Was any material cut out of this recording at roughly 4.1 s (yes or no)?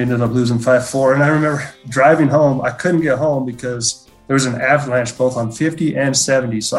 no